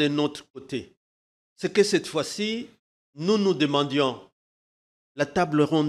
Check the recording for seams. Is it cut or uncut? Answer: uncut